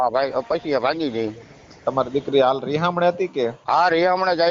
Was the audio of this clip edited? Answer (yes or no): yes